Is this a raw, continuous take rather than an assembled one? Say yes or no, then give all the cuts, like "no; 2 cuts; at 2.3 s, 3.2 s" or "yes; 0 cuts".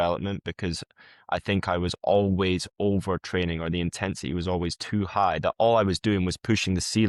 yes; 0 cuts